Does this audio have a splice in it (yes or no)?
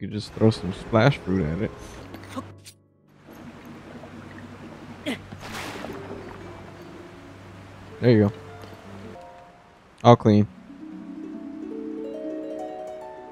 yes